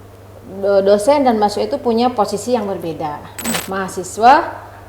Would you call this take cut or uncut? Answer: cut